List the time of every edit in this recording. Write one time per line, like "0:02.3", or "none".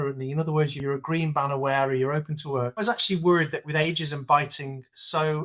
0:00.8
0:02.8